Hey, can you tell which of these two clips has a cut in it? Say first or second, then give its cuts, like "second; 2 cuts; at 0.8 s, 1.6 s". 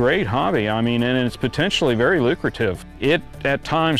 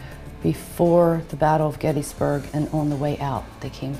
first; 1 cut; at 2.9 s